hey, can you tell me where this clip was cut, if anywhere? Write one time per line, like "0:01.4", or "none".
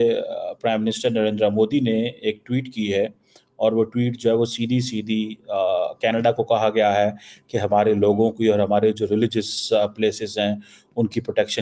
none